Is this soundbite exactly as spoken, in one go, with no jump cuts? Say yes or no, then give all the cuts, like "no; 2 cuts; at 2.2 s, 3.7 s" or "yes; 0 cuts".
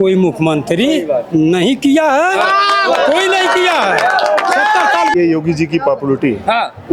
no; 1 cut; at 5.2 s